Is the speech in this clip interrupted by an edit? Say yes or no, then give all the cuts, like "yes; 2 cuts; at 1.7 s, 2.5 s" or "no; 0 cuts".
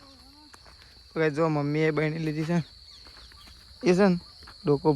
no; 0 cuts